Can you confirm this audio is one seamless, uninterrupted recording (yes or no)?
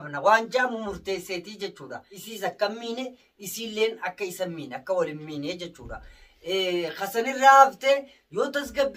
yes